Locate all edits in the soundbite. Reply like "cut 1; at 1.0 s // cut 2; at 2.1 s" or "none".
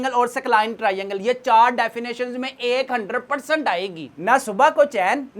cut 1; at 4.1 s